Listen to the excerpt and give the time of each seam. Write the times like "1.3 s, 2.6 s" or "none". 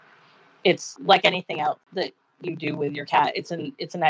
0.9 s, 1.8 s

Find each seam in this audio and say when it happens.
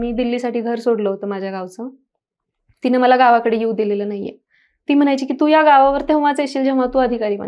none

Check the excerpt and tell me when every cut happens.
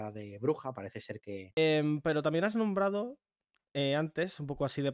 1.6 s

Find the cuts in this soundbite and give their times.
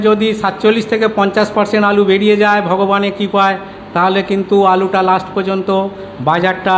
none

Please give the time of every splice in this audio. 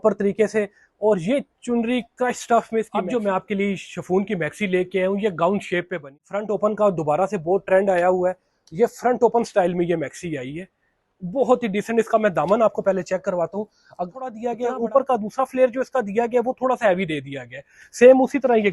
3.0 s, 6.1 s, 14.4 s

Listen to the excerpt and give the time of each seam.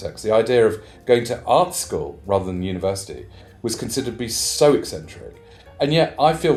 none

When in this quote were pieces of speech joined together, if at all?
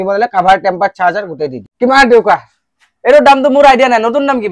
1.7 s

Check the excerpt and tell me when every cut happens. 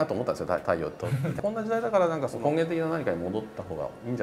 1.4 s, 2.3 s

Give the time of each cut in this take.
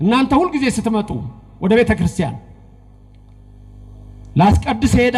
none

